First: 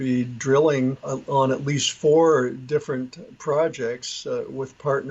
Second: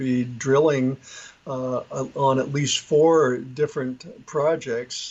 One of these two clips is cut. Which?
first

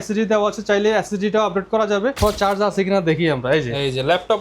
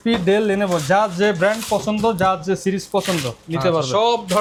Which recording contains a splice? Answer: first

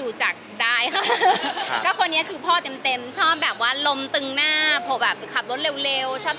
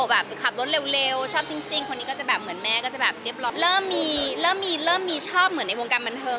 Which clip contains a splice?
second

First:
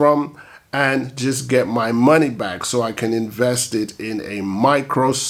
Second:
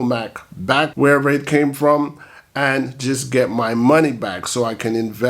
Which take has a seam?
second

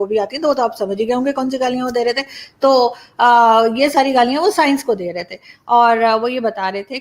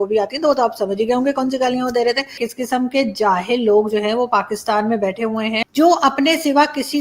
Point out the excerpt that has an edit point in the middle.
second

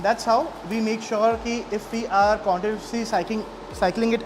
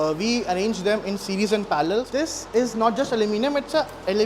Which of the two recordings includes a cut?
second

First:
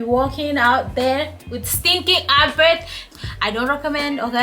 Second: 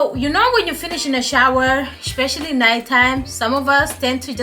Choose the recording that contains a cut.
first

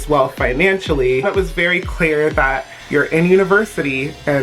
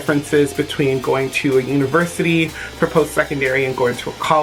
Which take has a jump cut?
first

